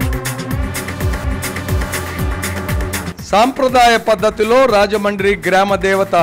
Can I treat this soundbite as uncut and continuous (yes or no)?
no